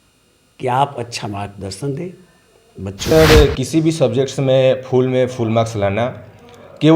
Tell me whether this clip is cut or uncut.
cut